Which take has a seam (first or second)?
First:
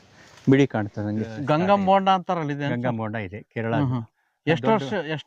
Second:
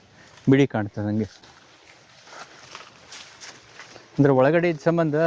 first